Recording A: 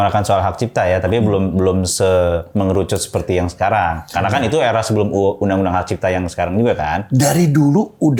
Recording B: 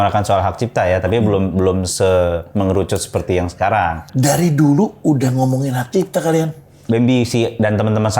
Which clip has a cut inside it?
B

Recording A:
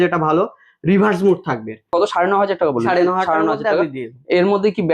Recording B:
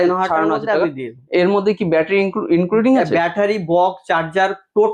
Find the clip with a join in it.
A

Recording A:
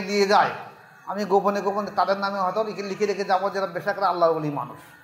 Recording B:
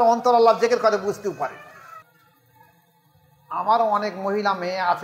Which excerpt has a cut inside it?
B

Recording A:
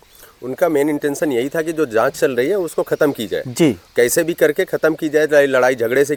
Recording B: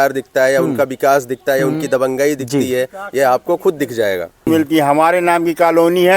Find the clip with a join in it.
B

